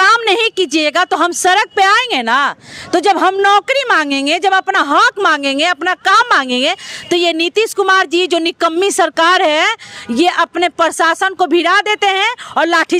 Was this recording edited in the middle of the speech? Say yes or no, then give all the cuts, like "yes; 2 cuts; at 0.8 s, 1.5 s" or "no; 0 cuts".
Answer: no; 0 cuts